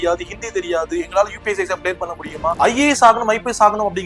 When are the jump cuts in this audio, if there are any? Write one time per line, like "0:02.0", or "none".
0:02.6